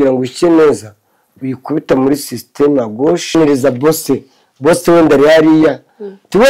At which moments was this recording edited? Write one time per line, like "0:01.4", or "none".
0:03.3

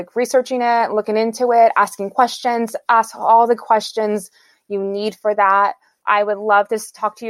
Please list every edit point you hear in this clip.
0:05.9

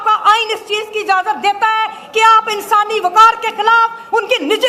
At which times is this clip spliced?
none

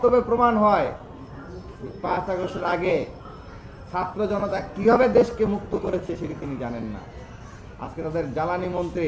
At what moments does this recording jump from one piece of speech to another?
none

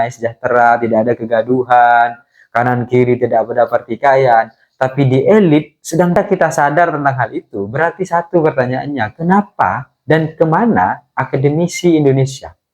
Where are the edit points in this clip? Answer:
0:06.1

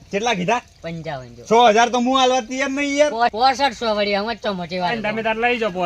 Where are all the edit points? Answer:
0:04.9

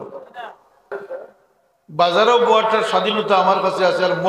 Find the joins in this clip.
0:00.9

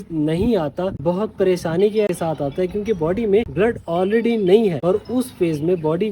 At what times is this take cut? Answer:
0:01.0
0:02.1
0:03.5
0:04.8

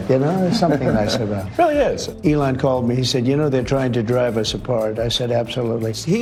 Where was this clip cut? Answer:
none

